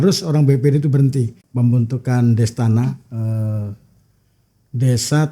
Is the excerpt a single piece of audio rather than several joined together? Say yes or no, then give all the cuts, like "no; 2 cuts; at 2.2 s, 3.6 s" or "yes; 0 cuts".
no; 1 cut; at 1.4 s